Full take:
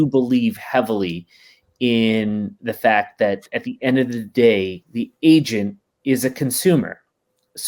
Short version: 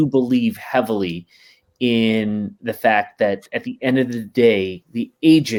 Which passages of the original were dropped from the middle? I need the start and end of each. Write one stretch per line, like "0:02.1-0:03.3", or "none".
none